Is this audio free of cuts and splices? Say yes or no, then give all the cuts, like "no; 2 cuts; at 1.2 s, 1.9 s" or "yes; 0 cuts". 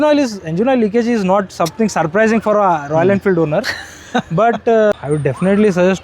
no; 1 cut; at 4.9 s